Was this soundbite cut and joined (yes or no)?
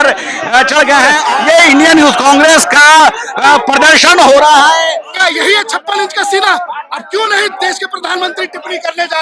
yes